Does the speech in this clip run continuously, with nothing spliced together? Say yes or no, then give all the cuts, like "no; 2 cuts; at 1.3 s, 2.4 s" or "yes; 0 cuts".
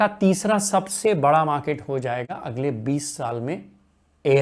yes; 0 cuts